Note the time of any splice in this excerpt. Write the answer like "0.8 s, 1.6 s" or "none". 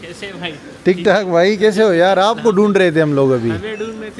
none